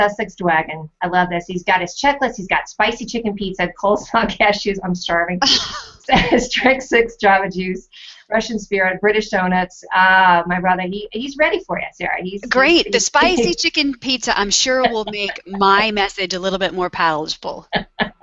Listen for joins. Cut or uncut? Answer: uncut